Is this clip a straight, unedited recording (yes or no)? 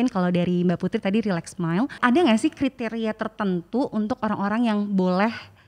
no